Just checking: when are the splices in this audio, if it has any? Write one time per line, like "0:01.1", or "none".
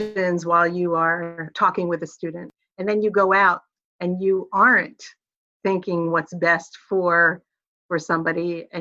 0:01.4
0:02.5

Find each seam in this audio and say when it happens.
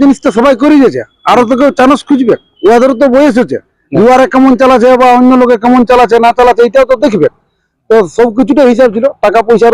none

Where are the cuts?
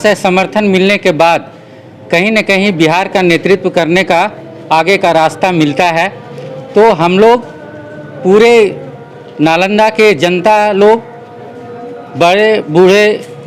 none

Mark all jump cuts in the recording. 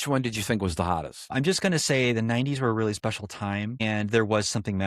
0:01.3
0:03.8

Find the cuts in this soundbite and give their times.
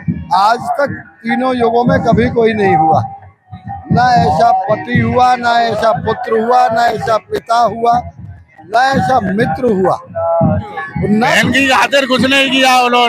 0:11.3

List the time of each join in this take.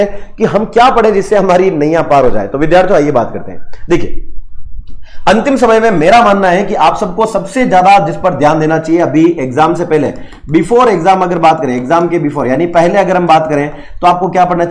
none

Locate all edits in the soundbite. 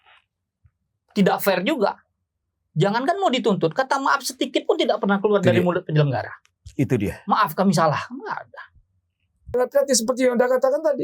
0:09.5

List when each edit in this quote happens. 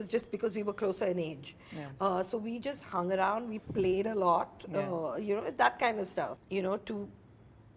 0:06.4

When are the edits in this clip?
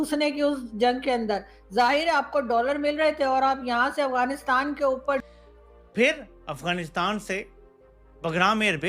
0:05.3

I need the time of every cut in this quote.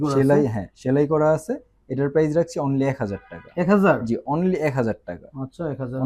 none

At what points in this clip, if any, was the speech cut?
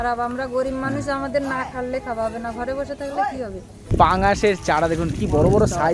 0:03.9

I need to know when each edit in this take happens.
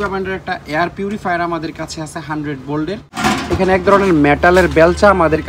0:03.2

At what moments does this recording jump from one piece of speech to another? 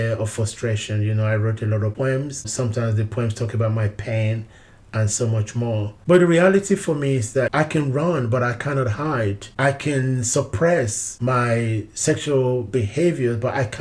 0:02.1
0:06.0
0:07.5

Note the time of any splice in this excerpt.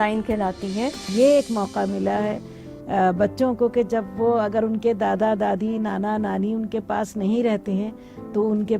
0:01.0

